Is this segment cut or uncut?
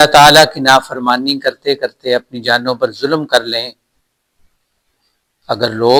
uncut